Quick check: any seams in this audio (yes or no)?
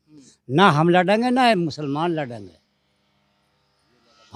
no